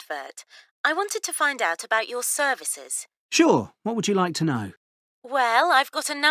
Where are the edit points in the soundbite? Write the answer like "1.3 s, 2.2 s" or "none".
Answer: 5.3 s